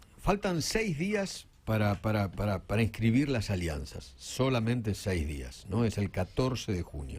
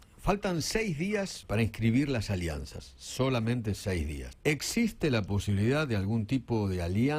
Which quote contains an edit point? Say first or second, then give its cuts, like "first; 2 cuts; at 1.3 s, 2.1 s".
second; 2 cuts; at 1.4 s, 4.2 s